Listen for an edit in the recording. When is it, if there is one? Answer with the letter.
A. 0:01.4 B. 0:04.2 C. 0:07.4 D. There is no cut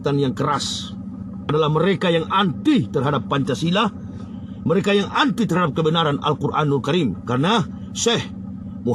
A